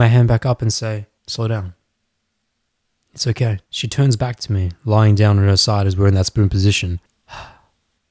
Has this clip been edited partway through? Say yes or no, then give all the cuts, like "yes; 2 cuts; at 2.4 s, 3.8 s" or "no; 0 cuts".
yes; 3 cuts; at 1.2 s, 3.7 s, 7.1 s